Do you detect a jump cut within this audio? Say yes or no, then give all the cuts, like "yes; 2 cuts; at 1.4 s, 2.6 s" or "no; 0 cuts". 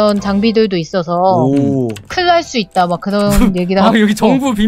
no; 0 cuts